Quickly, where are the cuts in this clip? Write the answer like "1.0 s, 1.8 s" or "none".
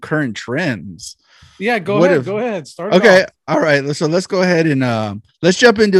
none